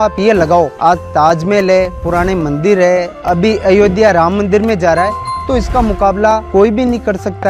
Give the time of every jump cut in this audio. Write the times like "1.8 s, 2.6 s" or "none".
none